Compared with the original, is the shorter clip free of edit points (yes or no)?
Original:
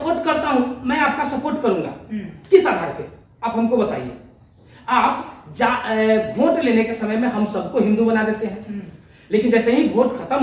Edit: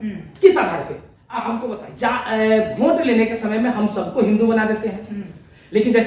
no